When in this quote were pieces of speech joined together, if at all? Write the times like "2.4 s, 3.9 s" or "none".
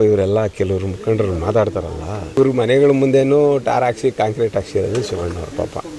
2.4 s